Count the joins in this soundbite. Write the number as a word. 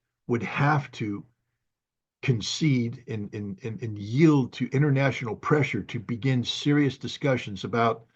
zero